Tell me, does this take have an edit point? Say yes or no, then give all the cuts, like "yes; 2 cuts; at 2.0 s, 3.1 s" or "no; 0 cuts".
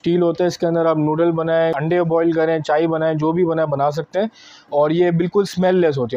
no; 0 cuts